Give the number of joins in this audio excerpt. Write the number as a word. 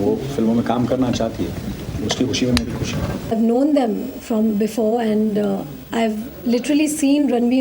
two